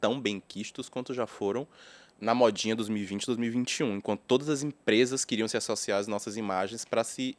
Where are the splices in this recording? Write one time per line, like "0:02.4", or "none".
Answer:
none